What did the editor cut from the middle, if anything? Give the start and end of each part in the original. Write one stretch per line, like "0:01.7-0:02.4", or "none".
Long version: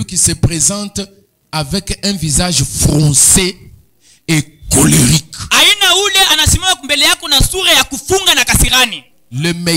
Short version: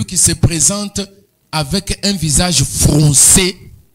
none